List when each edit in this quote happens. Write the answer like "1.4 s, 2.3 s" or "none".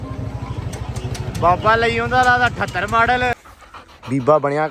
3.5 s